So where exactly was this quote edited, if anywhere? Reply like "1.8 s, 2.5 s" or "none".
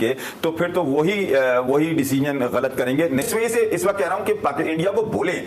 3.2 s